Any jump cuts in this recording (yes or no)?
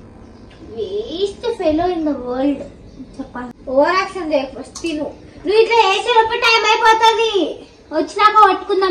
yes